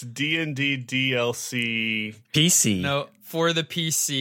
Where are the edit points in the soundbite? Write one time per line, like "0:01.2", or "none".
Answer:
0:03.3

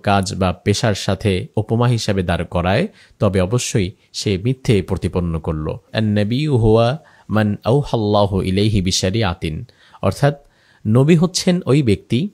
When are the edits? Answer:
0:05.9

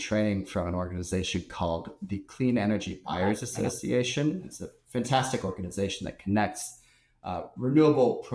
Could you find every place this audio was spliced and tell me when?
none

